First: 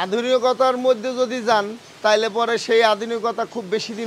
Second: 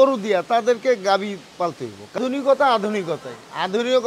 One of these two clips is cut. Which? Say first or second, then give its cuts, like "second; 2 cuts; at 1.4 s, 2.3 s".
second; 1 cut; at 2.2 s